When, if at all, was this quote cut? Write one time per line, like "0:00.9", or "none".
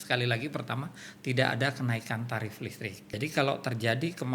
0:03.1